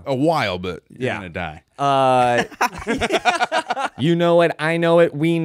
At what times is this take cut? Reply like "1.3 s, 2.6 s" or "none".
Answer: 3.9 s